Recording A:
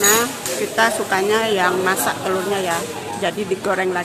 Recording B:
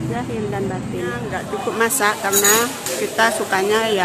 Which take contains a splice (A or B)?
B